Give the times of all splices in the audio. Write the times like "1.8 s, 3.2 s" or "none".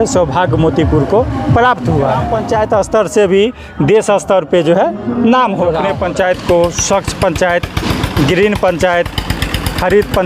2.3 s, 5.9 s